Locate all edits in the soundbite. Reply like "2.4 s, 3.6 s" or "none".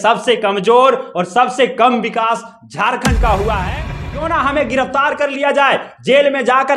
3.7 s